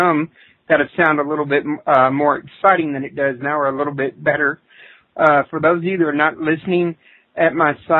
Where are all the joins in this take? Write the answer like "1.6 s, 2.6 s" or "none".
none